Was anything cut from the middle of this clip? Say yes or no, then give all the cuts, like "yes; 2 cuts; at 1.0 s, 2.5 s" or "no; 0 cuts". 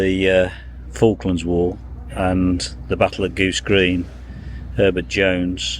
no; 0 cuts